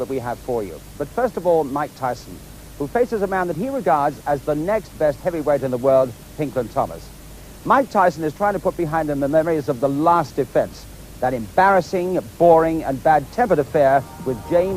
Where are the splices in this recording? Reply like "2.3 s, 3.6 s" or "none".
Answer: 8.8 s